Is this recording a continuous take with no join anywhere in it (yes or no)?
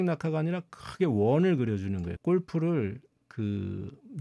no